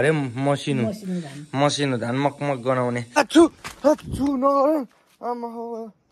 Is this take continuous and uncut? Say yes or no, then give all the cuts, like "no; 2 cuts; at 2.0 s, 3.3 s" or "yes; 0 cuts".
no; 1 cut; at 3.2 s